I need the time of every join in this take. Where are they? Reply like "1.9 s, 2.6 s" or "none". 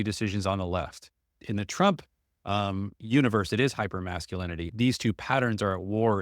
1.4 s, 4.7 s